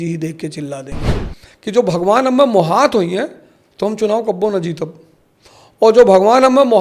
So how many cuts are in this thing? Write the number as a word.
one